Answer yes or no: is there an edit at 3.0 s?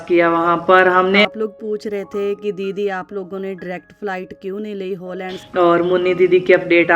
no